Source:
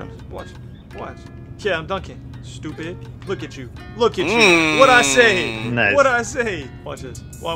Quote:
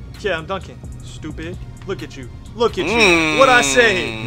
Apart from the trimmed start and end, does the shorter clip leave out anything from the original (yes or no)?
no